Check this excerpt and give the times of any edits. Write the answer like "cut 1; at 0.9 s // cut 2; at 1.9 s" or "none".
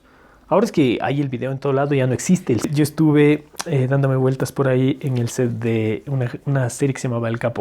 cut 1; at 2.7 s